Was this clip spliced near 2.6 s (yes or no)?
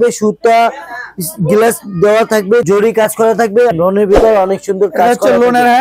yes